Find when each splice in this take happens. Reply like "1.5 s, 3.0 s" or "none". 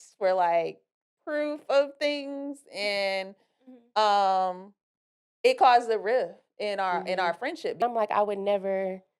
7.8 s